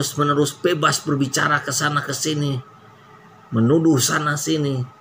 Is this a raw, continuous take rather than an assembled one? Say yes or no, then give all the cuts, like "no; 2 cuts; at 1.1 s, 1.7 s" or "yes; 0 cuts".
yes; 0 cuts